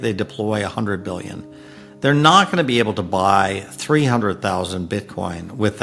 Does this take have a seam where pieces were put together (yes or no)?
no